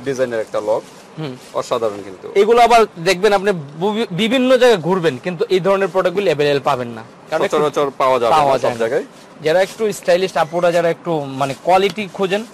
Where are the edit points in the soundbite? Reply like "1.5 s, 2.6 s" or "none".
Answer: none